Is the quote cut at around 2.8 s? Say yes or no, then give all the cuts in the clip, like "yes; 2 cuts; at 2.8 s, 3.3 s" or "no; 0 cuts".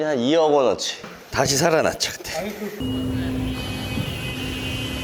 yes; 1 cut; at 2.8 s